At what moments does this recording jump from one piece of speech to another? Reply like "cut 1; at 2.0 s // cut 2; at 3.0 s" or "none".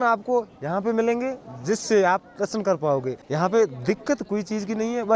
cut 1; at 3.2 s